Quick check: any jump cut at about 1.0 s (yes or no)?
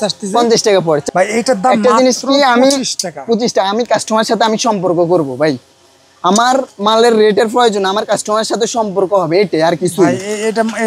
yes